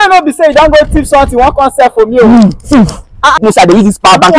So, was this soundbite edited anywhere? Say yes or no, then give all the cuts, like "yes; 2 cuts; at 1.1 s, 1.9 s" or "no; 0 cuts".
yes; 1 cut; at 3.4 s